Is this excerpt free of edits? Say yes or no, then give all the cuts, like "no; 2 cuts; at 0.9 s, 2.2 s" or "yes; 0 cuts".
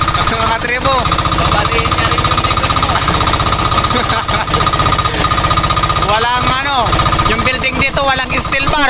yes; 0 cuts